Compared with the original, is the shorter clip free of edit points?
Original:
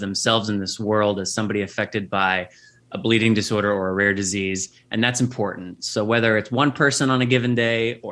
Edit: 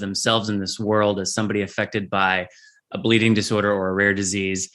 yes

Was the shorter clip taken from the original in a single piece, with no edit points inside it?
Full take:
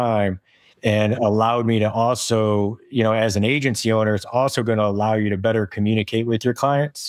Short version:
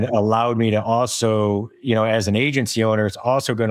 yes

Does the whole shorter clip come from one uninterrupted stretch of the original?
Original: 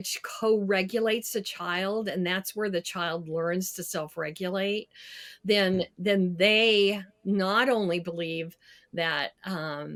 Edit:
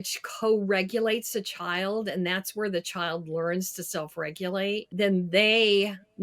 no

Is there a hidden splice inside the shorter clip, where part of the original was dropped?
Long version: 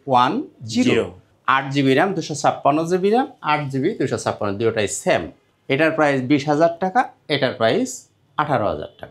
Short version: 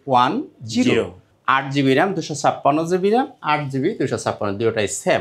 no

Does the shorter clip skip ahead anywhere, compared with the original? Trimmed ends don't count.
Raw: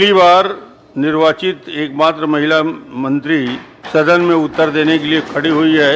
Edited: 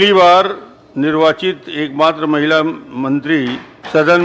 no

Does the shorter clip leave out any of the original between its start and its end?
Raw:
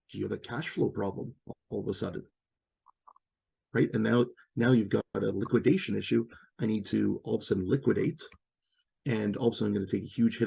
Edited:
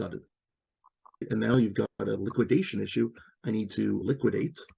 yes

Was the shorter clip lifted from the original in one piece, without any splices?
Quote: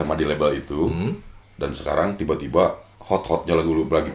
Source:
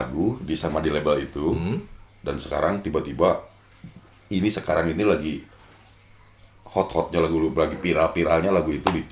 no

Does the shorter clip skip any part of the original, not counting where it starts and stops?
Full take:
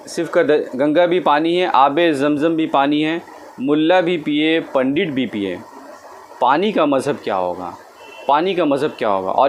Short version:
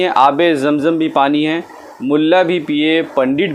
no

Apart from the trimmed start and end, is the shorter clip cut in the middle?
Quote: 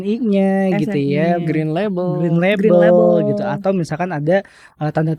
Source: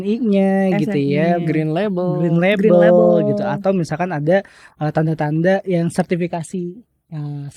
no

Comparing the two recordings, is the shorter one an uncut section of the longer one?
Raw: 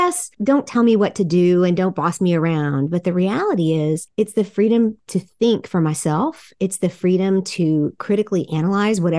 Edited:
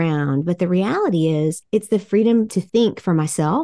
no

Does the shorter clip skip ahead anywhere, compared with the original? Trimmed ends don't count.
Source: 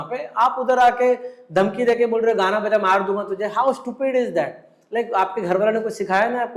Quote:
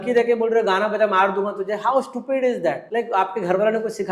yes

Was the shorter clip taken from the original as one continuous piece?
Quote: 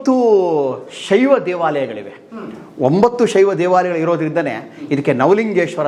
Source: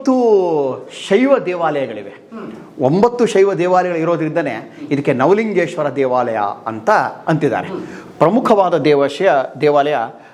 yes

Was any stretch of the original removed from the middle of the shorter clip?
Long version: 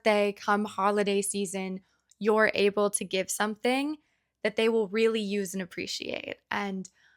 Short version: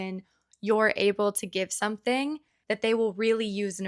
yes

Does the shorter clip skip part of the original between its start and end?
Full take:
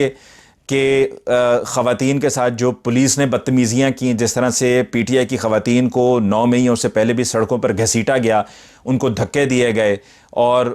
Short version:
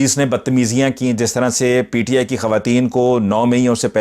no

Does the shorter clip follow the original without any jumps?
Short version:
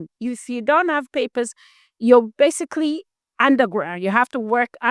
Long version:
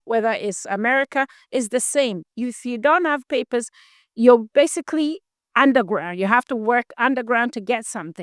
yes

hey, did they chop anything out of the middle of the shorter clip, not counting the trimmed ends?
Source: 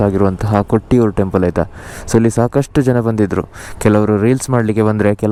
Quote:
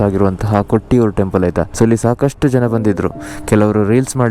yes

